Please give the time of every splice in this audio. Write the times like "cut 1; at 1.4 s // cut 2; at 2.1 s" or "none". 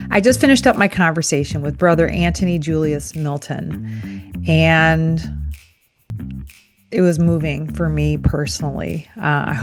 none